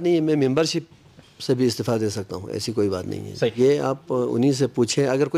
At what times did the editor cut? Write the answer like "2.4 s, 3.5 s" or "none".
3.6 s